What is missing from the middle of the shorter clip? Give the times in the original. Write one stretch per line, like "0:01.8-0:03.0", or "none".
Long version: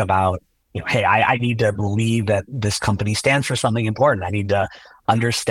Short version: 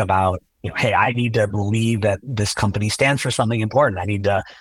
0:01.0-0:01.3

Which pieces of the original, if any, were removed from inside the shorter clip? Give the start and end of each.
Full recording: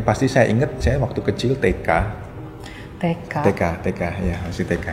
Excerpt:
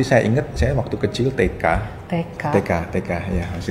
0:02.2-0:02.9

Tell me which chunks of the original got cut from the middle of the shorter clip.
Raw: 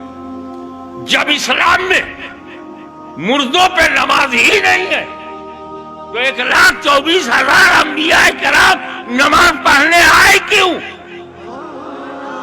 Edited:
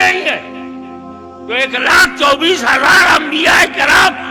none

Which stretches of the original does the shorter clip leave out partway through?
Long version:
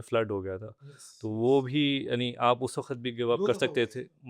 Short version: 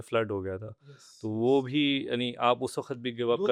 none

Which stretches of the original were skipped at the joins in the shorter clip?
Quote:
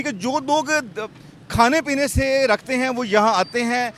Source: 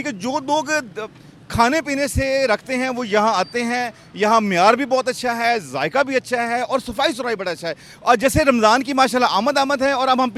none

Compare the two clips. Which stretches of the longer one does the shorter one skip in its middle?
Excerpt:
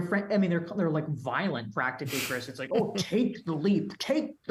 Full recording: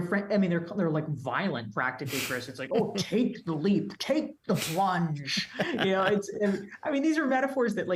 none

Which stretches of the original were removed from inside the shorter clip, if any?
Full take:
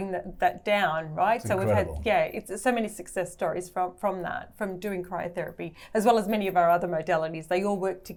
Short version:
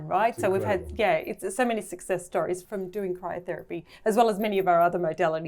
0:03.7-0:04.5

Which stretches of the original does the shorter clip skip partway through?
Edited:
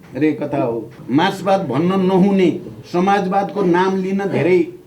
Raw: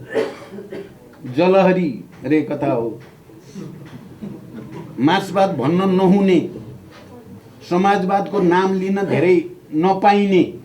0:03.0-0:04.8
0:06.6-0:07.5

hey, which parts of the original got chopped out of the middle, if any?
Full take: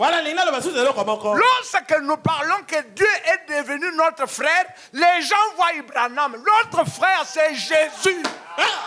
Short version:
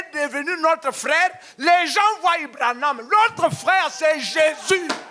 none

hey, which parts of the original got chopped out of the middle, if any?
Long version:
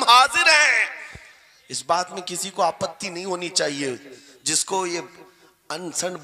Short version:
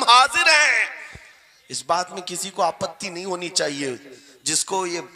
none

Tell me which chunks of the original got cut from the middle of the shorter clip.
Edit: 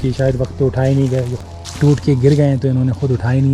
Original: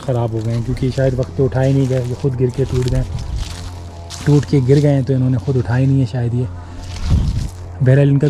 0:02.1-0:03.8

